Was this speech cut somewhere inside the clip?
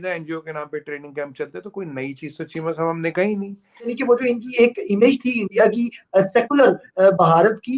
yes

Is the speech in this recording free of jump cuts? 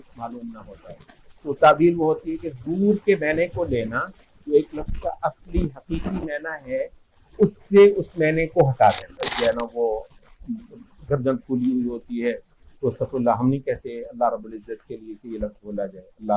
no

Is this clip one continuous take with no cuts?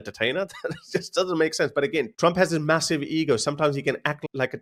yes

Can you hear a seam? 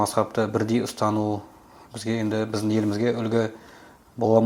no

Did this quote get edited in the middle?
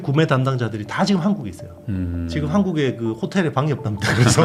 no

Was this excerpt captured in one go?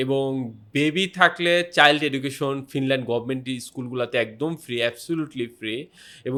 yes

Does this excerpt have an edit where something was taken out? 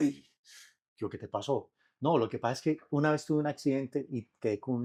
no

